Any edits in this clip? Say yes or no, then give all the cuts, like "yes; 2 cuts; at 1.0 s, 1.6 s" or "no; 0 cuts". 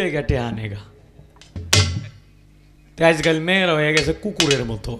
no; 0 cuts